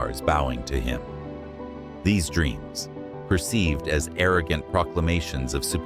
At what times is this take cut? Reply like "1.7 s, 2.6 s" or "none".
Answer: none